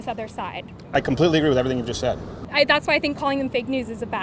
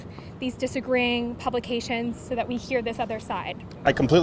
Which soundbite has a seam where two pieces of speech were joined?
first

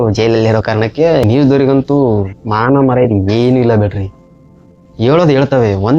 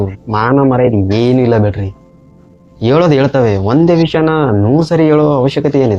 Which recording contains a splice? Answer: first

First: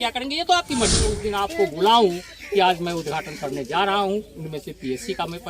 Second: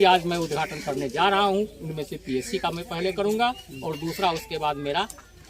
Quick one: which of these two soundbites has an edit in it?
first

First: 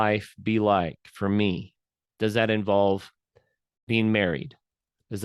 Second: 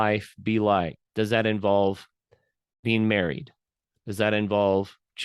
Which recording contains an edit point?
second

